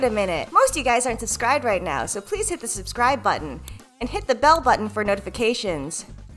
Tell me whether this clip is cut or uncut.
uncut